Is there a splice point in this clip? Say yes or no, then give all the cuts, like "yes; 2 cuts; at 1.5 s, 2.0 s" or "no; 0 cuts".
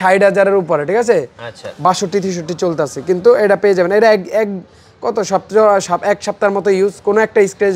no; 0 cuts